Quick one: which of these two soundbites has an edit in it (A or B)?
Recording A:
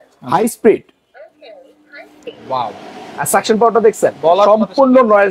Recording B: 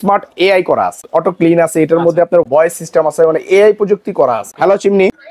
B